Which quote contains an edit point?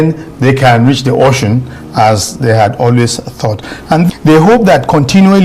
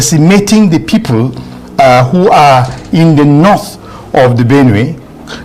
first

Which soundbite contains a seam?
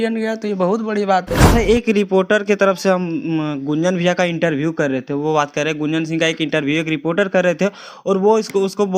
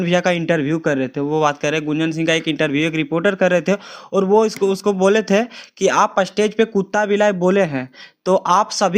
first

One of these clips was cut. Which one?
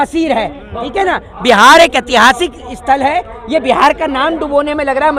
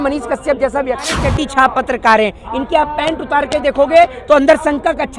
second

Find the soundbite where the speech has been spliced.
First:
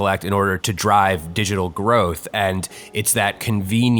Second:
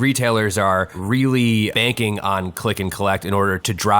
second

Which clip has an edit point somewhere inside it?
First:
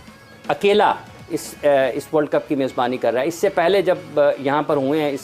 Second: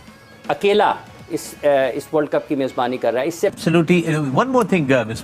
second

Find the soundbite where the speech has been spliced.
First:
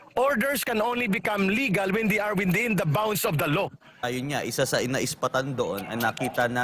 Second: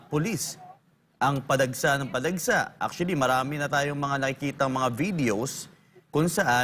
first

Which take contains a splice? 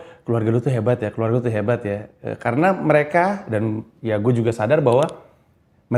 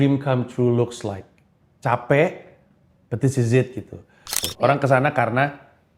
second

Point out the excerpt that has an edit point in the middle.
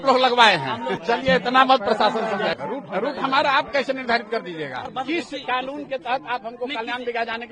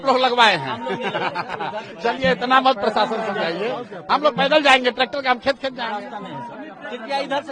first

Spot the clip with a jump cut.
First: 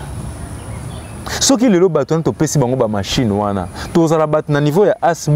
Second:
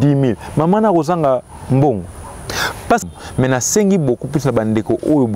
second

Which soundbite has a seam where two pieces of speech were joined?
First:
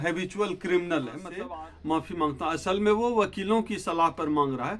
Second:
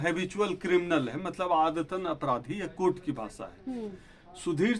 first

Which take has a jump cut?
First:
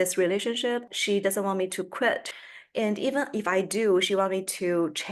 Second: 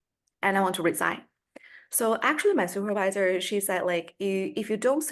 first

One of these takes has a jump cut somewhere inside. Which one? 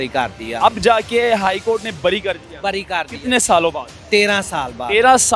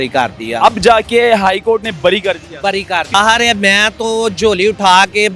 second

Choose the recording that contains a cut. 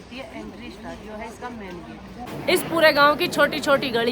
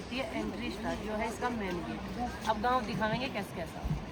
first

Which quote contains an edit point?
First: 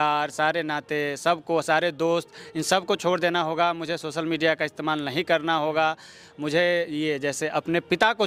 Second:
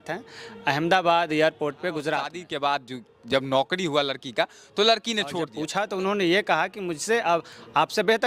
second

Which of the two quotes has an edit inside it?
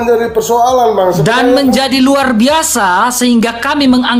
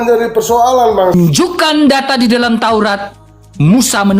second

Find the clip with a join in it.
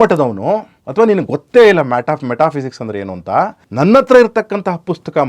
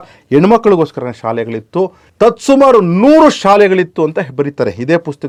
first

